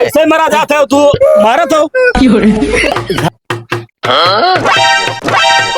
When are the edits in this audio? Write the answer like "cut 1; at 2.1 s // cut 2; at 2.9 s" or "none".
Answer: cut 1; at 3.2 s